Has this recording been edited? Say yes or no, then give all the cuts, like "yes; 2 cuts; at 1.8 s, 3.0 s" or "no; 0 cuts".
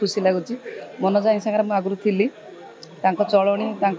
no; 0 cuts